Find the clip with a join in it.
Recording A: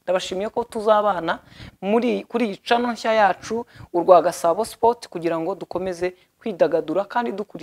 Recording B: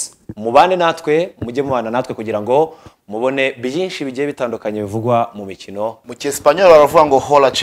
B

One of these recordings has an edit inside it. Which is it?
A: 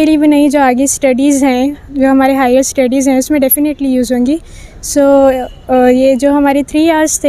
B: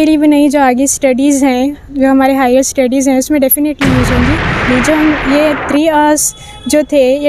B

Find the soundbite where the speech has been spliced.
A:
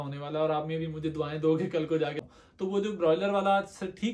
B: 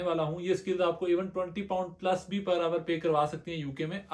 A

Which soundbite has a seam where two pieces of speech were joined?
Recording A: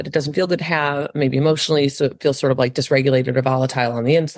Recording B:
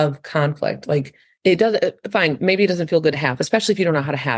B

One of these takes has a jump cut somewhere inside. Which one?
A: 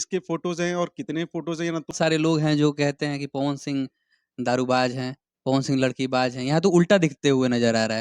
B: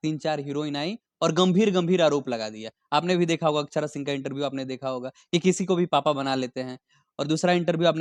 A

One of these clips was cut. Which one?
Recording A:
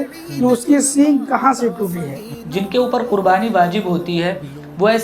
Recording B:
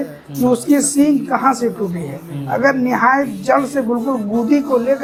A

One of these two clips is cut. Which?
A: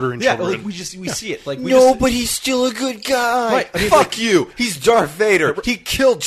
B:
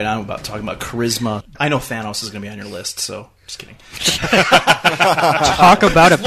B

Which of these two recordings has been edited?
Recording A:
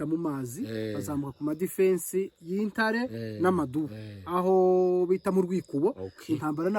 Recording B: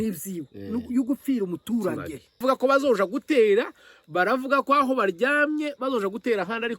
B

